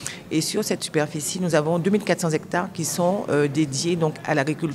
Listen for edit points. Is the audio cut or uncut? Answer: uncut